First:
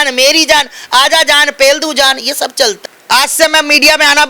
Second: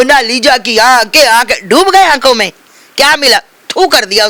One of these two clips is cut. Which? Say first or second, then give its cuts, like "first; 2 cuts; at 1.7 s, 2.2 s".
first; 1 cut; at 2.9 s